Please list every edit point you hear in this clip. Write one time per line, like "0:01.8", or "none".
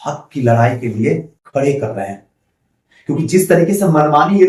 none